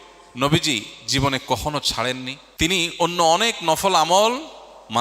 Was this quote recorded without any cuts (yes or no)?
no